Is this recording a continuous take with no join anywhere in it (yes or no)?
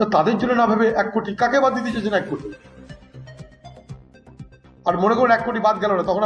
no